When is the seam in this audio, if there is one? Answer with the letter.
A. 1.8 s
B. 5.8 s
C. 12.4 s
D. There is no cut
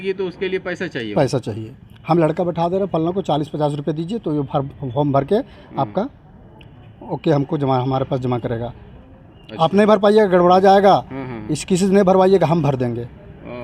D